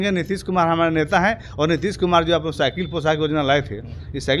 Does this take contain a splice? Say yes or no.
no